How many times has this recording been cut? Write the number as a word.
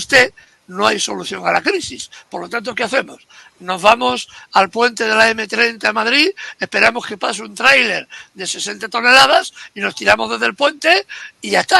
zero